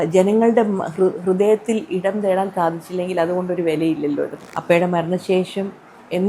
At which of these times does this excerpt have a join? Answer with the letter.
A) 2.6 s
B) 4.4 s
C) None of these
B